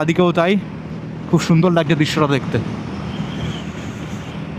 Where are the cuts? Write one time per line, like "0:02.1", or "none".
none